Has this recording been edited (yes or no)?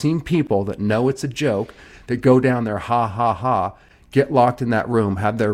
no